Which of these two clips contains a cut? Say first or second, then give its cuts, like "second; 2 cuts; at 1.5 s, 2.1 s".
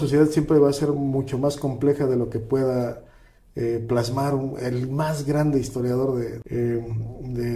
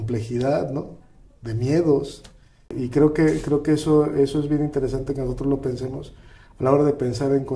first; 1 cut; at 6.4 s